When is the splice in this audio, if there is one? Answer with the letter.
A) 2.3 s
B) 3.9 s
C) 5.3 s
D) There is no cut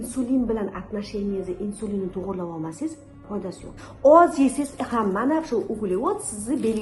B